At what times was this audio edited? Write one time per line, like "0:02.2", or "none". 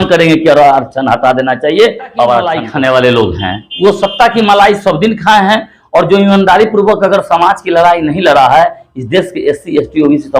0:02.6